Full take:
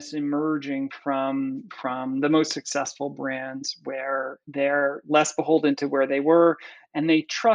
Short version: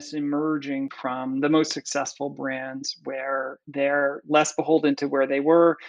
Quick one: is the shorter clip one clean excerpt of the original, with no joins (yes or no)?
no